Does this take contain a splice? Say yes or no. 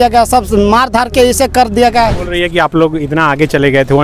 yes